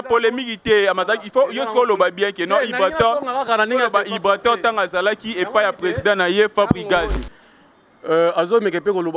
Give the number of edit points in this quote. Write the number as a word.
one